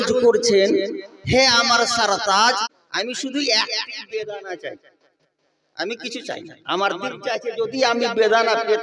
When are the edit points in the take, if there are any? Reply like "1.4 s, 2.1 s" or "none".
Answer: 2.8 s